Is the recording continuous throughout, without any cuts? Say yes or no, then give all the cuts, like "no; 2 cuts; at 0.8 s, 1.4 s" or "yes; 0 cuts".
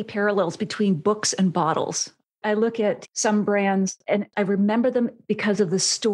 no; 2 cuts; at 2.2 s, 4.3 s